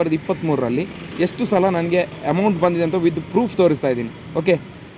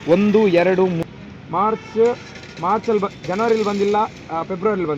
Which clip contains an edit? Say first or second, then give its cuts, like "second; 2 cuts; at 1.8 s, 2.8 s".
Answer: second; 1 cut; at 1.0 s